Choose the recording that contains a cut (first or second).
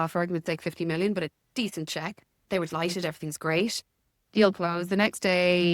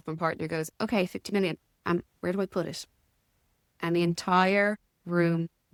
first